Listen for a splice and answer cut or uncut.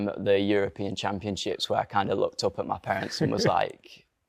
uncut